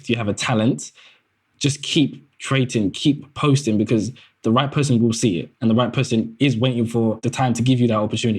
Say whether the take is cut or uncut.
cut